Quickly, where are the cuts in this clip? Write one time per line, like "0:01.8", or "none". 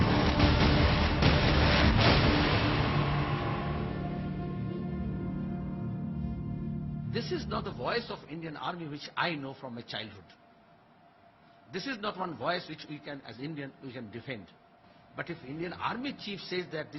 0:01.4